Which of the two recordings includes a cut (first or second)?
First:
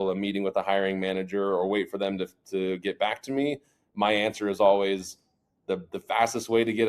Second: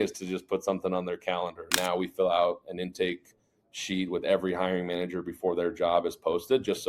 second